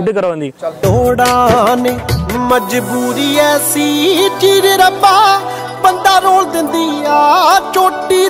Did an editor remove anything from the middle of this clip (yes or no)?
no